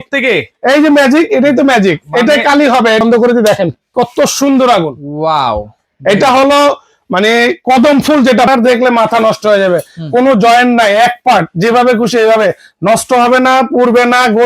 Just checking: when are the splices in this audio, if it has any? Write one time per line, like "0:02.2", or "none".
0:03.0
0:08.5